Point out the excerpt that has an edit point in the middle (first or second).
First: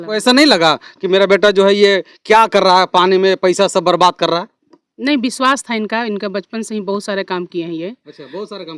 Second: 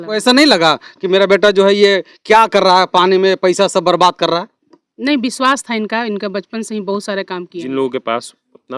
second